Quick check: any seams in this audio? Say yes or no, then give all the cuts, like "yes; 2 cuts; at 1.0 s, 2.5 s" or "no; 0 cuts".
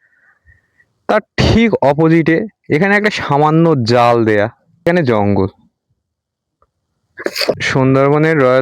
yes; 2 cuts; at 4.9 s, 7.5 s